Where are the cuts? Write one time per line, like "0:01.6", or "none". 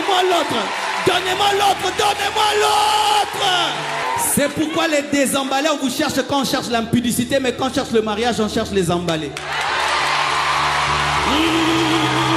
0:04.0